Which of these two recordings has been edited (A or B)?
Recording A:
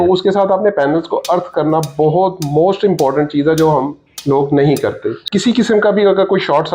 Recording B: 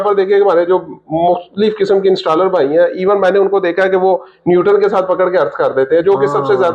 A